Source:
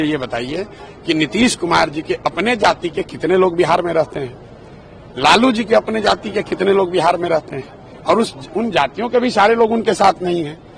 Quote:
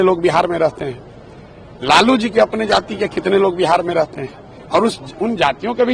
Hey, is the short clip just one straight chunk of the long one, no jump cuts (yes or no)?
yes